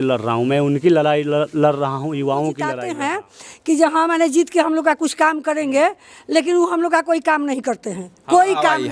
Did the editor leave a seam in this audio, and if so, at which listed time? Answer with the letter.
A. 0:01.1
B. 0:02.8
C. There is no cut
B